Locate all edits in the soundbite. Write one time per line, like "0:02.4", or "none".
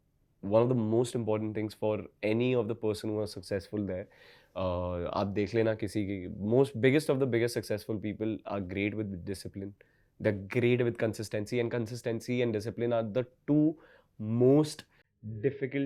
none